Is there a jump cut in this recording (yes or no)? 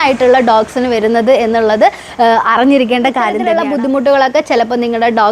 yes